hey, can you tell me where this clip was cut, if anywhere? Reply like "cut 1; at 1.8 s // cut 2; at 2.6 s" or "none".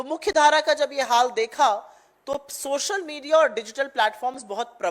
none

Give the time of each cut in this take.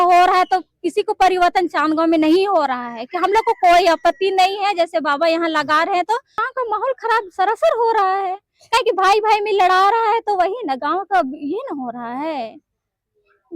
cut 1; at 6.5 s

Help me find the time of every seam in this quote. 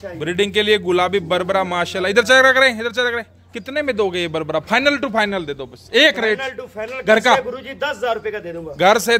none

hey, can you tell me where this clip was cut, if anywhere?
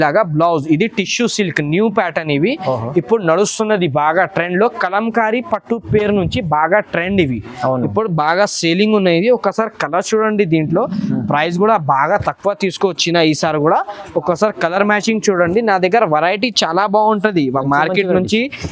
none

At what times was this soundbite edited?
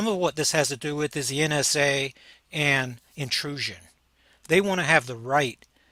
none

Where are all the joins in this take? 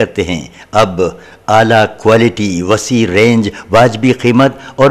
none

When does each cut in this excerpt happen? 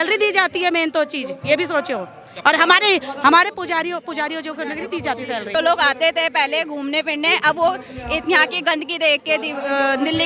cut 1; at 5.5 s

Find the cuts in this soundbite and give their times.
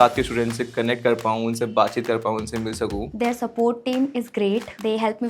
cut 1; at 3.1 s

